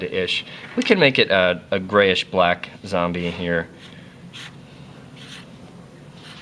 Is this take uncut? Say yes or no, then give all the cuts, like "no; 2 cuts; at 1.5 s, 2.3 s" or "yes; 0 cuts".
yes; 0 cuts